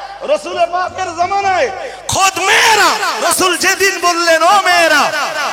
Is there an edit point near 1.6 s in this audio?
no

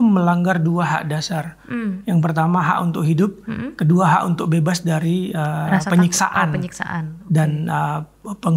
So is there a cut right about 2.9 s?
no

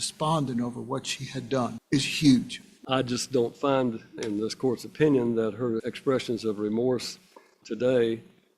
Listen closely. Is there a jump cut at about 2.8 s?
yes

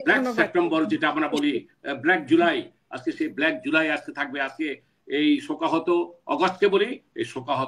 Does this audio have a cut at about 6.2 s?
no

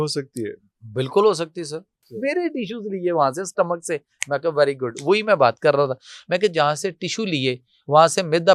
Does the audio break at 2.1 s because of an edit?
yes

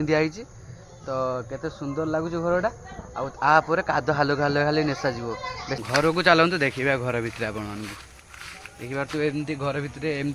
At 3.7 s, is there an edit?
no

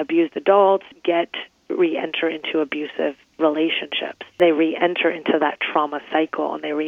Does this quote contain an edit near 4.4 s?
yes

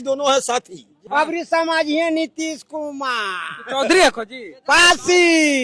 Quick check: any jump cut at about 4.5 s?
no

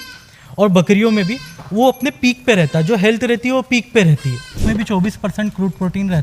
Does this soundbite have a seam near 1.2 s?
no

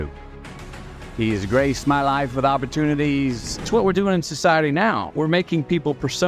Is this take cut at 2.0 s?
no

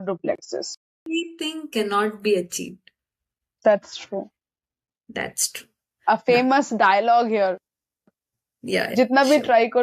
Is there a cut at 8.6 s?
no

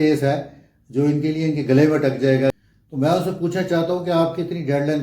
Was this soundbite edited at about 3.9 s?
no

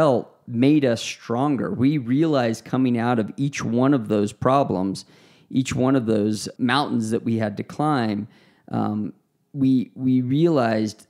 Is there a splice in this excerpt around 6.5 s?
yes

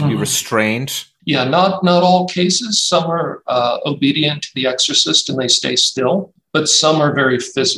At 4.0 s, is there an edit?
no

